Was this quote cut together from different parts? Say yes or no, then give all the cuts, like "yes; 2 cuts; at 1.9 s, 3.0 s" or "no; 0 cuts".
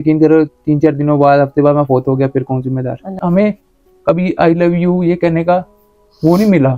yes; 1 cut; at 3.2 s